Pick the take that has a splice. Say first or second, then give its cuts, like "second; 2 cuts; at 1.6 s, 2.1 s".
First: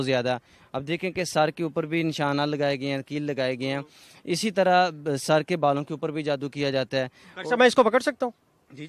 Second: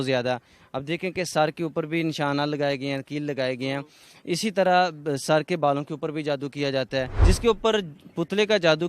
second; 1 cut; at 7.1 s